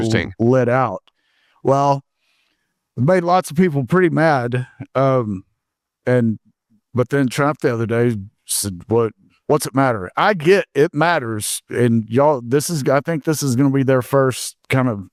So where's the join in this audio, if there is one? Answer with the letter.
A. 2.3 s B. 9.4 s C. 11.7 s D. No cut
D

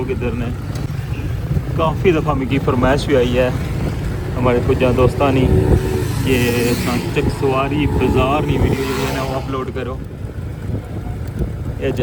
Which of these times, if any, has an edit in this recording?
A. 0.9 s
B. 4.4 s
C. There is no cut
A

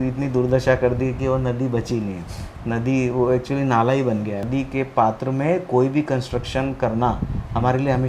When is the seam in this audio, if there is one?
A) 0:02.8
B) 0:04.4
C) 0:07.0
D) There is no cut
B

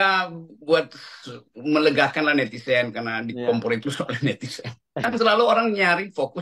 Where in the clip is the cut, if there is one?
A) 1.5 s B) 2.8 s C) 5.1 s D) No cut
C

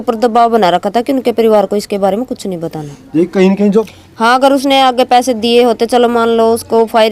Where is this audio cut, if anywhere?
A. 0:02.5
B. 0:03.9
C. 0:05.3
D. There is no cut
B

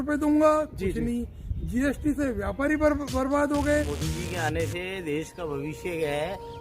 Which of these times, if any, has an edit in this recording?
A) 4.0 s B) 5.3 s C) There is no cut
A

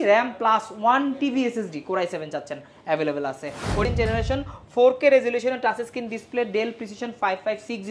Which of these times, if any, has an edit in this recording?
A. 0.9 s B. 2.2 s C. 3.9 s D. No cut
C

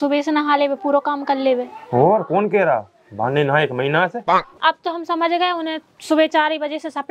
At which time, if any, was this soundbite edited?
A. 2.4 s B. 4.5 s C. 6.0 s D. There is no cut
B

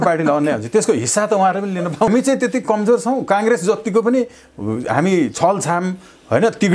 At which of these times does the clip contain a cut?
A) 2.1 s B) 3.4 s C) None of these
A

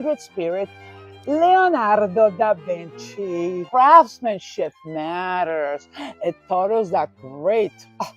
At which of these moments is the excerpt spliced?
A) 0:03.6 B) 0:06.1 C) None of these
A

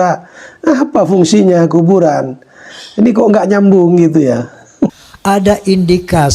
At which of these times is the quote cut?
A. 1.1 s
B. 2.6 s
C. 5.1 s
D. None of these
C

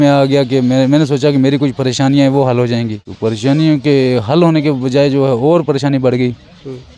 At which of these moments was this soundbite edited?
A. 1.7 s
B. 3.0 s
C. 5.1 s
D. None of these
B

